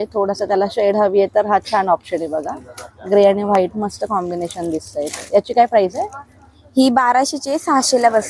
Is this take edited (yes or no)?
no